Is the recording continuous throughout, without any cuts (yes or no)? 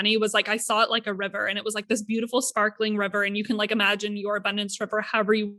yes